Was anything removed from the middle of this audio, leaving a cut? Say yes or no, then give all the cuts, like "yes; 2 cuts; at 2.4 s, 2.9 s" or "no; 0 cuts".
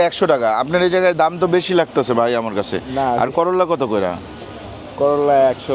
no; 0 cuts